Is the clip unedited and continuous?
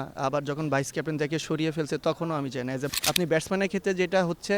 no; 1 cut; at 2.9 s

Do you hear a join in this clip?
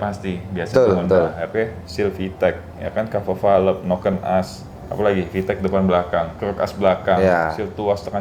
no; 0 cuts

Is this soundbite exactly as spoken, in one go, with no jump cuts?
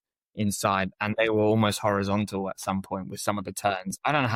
yes; 0 cuts

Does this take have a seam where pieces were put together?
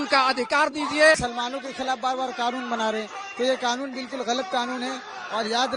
yes; 1 cut; at 1.2 s

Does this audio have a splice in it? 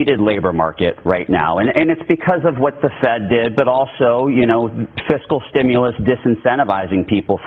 no; 0 cuts

